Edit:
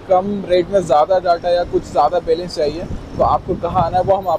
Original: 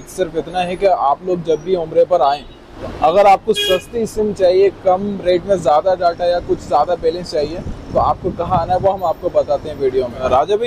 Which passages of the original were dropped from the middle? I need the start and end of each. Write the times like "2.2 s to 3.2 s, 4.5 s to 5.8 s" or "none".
none